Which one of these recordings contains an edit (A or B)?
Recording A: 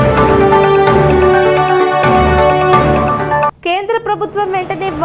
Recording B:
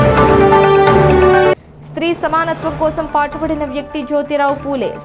A